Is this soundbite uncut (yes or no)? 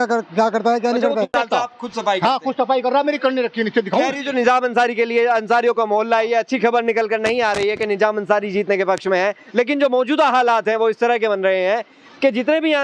no